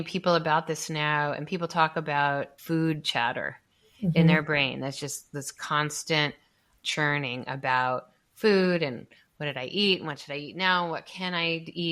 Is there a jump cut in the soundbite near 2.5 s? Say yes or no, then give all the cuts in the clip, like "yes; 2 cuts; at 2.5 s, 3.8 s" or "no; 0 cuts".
yes; 1 cut; at 2.5 s